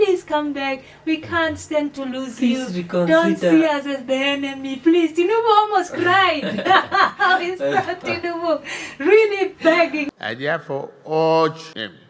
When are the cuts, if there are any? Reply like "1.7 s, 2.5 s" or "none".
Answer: 10.0 s